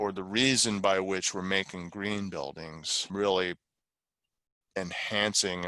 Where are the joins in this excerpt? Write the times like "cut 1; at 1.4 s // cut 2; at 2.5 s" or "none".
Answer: cut 1; at 3.1 s